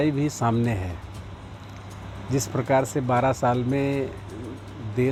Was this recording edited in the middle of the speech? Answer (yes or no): no